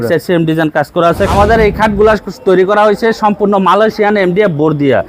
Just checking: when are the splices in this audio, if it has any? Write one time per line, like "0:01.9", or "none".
0:01.3